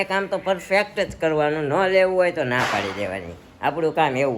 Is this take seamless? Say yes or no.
yes